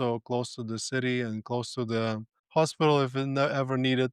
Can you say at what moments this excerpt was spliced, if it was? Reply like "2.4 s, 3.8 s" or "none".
2.3 s

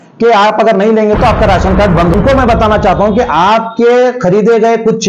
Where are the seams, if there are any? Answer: 2.1 s

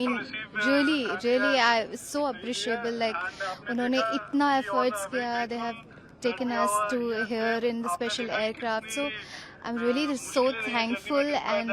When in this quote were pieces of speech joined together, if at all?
none

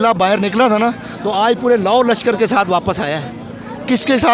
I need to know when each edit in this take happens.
none

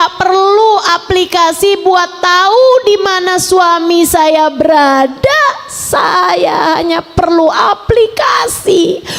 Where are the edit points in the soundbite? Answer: none

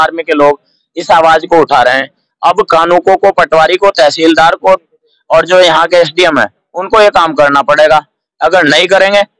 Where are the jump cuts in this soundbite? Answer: none

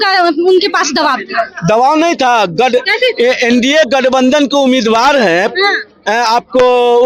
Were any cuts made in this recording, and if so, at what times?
none

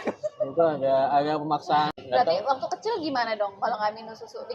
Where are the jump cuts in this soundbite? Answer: 1.9 s

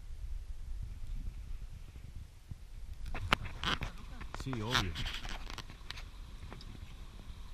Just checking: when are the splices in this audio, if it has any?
3.3 s

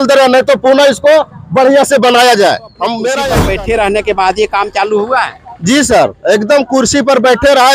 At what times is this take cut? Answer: 3.2 s

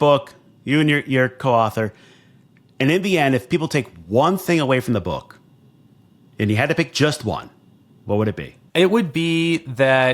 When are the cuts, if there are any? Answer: 8.5 s

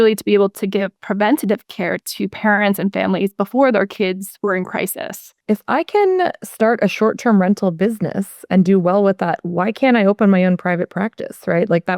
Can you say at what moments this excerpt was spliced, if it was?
5.3 s

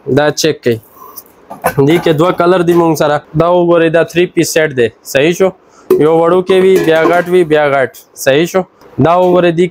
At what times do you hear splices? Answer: 3.2 s, 8.8 s

